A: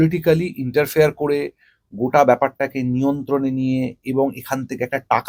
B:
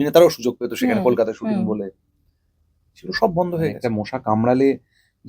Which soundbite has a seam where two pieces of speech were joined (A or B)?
B